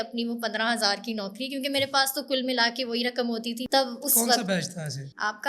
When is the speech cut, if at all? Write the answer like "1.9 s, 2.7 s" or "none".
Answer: 3.6 s